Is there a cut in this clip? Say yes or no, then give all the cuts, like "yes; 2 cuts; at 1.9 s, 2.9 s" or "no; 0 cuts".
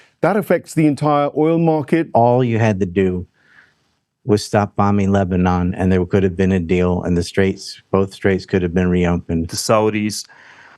yes; 2 cuts; at 2.1 s, 9.5 s